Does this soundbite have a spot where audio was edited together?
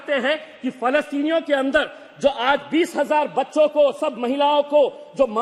no; 0 cuts

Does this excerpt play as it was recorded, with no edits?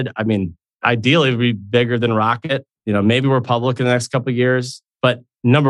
no; 2 cuts; at 0.8 s, 2.8 s

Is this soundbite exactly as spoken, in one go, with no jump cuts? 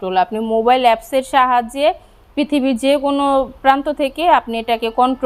yes; 0 cuts

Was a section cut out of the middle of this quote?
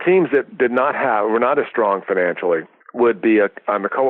yes; 1 cut; at 2.8 s

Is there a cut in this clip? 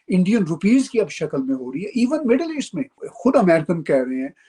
yes; 1 cut; at 3.0 s

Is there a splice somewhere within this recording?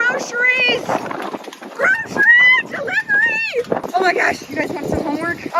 yes; 1 cut; at 3.8 s

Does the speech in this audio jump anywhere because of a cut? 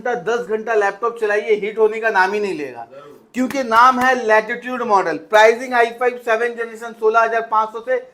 no; 0 cuts

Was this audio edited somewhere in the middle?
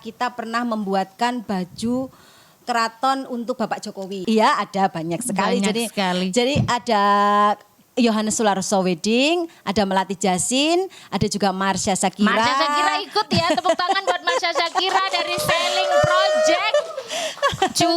yes; 1 cut; at 4.1 s

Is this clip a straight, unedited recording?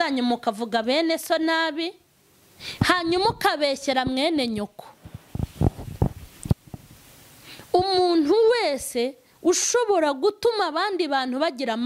no; 1 cut; at 6.5 s

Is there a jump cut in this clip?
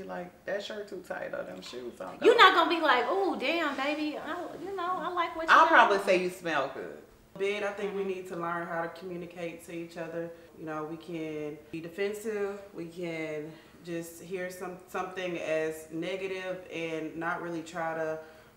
yes; 3 cuts; at 7.3 s, 10.5 s, 11.6 s

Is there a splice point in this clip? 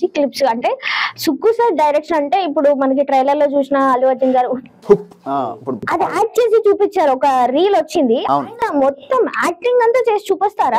yes; 1 cut; at 4.8 s

